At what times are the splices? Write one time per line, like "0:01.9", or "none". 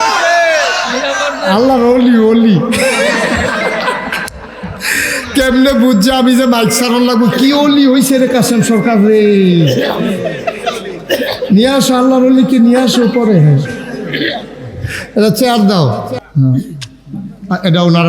0:16.2